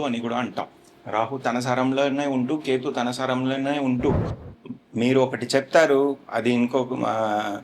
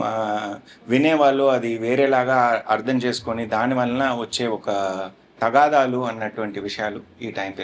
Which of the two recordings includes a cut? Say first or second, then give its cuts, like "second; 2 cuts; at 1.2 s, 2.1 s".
first; 1 cut; at 4.2 s